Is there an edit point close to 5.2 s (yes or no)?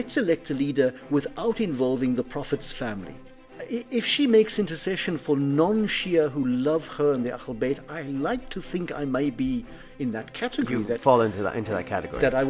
no